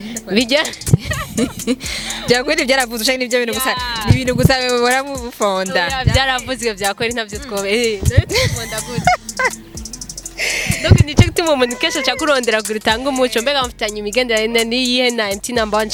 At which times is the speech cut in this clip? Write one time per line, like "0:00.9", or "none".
none